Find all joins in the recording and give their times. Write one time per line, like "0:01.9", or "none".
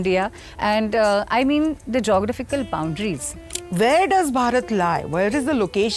0:03.5